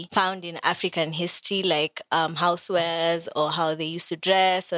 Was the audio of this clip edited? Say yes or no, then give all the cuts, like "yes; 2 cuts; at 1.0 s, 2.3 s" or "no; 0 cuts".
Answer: no; 0 cuts